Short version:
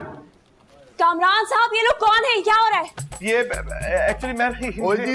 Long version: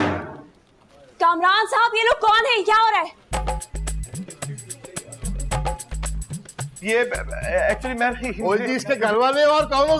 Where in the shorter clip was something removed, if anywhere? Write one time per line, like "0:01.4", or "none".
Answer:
0:03.0